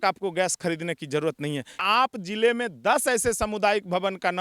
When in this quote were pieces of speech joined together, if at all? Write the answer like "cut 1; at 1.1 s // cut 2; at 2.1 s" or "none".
cut 1; at 1.8 s